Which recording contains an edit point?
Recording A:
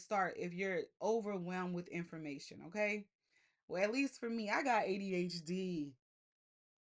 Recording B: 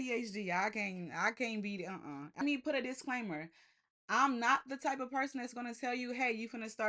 B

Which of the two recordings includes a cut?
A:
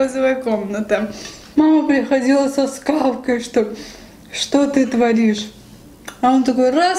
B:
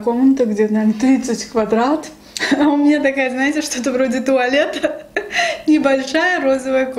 A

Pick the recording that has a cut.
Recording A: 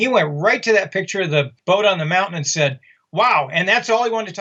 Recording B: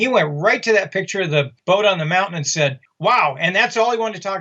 B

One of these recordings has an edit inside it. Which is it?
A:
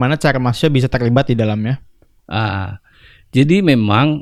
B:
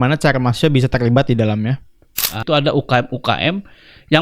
B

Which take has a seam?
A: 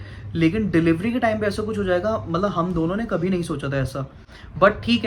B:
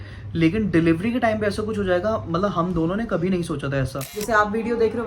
B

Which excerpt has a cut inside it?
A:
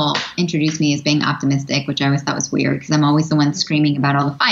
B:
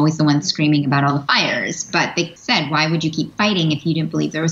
B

